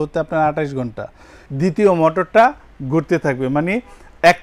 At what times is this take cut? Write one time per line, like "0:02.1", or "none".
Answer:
0:01.4